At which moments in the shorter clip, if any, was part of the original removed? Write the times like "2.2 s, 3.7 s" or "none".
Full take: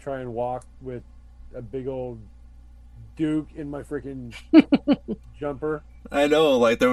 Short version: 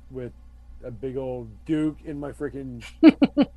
1.5 s